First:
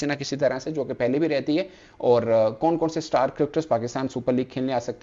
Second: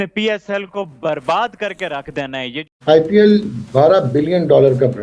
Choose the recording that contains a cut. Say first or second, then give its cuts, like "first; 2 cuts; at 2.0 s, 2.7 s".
second; 1 cut; at 2.7 s